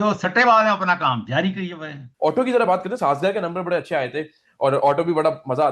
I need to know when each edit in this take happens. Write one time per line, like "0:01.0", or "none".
0:02.0

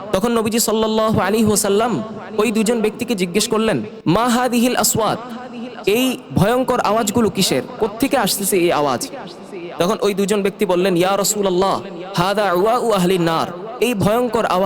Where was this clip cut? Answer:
0:13.6

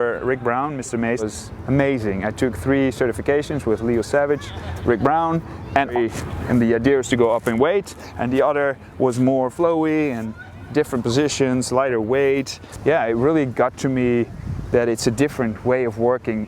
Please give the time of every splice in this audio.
0:01.2
0:05.9
0:12.6

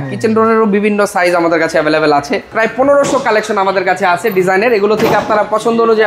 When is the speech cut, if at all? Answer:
0:02.5

